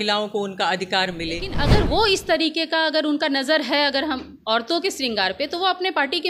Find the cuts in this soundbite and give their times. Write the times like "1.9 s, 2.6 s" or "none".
1.6 s

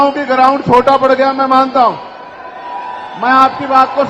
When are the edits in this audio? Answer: none

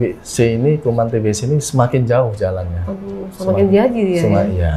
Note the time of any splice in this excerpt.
none

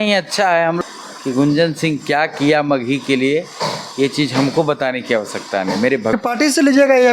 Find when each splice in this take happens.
0.8 s, 6.1 s

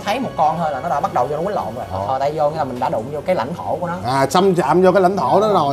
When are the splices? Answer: 2.0 s

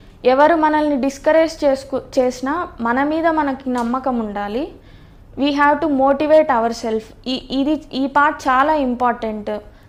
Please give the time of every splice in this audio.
none

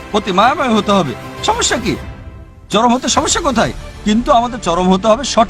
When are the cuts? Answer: none

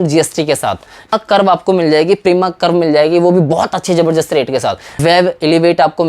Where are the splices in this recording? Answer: 1.1 s, 5.0 s

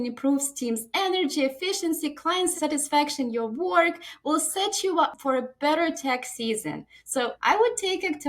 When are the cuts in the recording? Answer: 2.5 s, 5.2 s, 7.3 s

